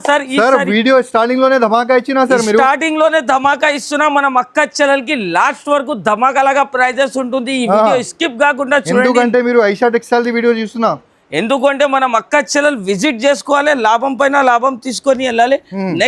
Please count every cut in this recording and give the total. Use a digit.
0